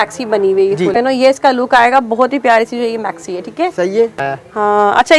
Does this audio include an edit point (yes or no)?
yes